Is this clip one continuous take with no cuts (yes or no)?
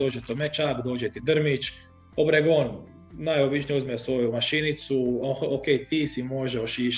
yes